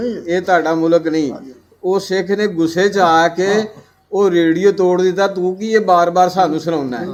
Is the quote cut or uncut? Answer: uncut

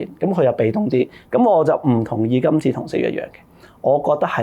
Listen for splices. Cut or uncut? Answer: cut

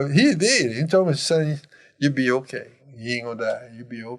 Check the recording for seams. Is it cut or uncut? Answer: cut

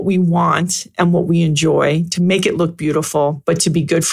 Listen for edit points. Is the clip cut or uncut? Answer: uncut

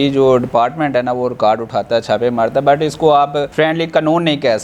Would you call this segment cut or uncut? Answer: uncut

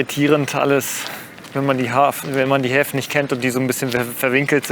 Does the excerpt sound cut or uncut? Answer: uncut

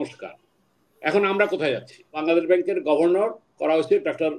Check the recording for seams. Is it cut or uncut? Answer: cut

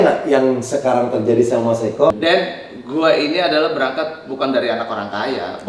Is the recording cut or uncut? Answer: cut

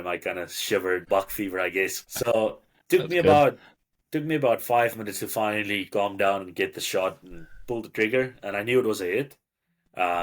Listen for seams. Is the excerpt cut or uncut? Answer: cut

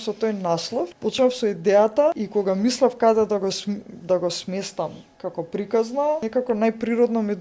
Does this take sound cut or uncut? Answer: cut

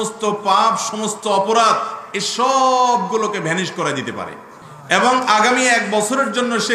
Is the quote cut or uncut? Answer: uncut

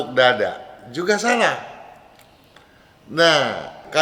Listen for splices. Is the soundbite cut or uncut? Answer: uncut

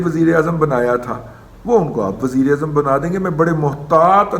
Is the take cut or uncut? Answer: uncut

